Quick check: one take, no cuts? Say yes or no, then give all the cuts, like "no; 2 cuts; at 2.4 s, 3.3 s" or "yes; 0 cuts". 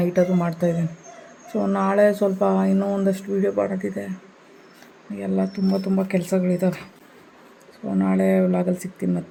yes; 0 cuts